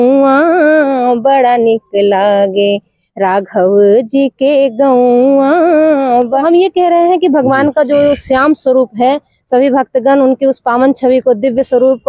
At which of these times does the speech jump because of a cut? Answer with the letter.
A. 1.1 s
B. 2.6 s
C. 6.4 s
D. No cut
C